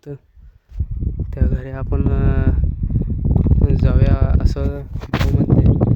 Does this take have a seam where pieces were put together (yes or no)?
no